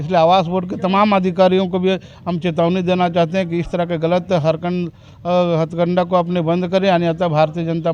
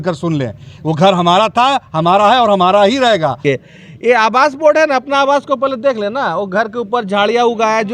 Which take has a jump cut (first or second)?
second